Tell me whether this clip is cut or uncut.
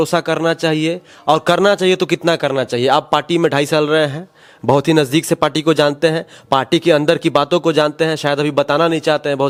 uncut